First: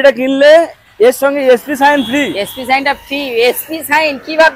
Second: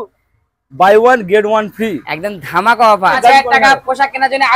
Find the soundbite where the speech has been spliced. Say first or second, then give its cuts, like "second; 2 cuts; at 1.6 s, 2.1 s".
second; 1 cut; at 3.2 s